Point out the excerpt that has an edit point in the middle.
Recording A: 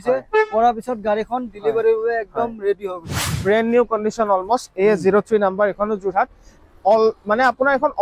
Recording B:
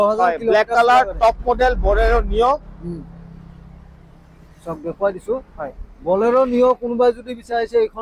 A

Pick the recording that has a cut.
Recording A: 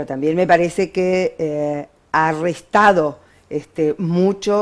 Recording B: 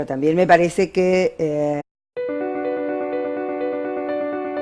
A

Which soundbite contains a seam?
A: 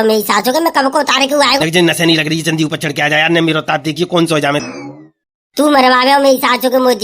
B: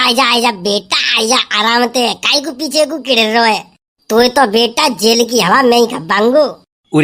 A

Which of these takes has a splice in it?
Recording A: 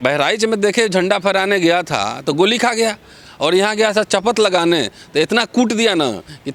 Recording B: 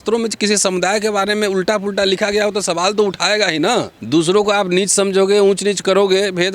B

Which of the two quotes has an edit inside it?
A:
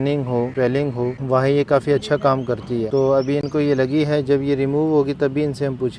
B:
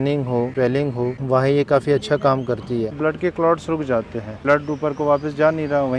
B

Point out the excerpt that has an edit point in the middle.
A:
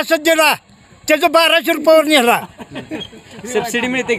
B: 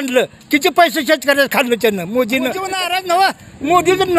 B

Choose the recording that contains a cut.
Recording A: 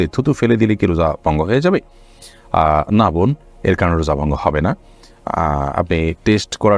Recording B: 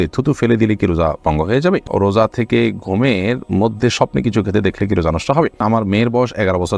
B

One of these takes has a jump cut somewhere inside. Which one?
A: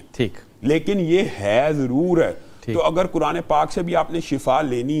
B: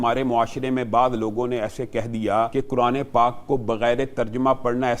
B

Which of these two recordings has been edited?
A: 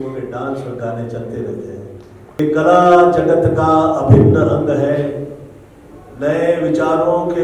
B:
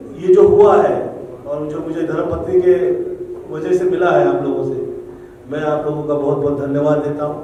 A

